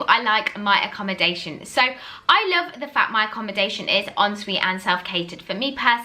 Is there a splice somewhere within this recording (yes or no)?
no